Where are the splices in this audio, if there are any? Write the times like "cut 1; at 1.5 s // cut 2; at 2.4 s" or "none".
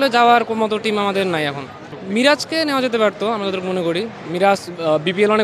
none

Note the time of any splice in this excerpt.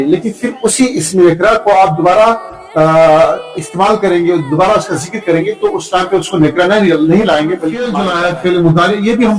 cut 1; at 7.8 s

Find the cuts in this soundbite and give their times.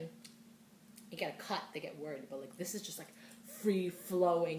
none

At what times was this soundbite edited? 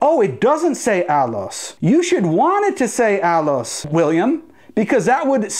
none

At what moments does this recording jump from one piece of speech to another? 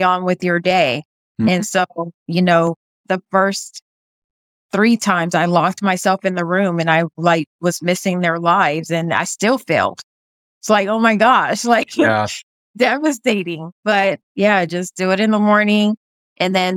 cut 1; at 2.1 s // cut 2; at 3.0 s // cut 3; at 14.3 s

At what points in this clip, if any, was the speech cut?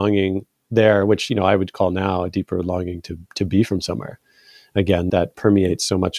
cut 1; at 5.1 s

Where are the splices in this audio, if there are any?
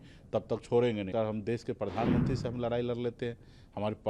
cut 1; at 1.1 s

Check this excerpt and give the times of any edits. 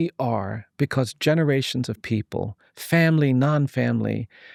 none

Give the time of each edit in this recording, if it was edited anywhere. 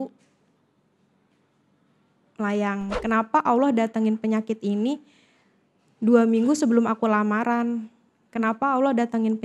cut 1; at 3.0 s

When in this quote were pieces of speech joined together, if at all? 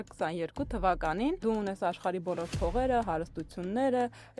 cut 1; at 1.4 s

